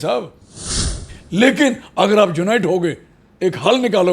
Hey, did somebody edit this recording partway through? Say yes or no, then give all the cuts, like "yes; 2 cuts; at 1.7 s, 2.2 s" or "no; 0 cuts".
yes; 1 cut; at 0.9 s